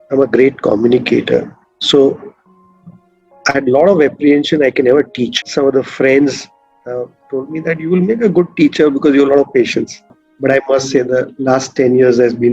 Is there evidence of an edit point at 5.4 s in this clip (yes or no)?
yes